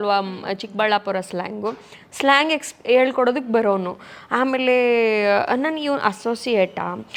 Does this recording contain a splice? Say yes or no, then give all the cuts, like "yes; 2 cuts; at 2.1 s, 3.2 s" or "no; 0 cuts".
no; 0 cuts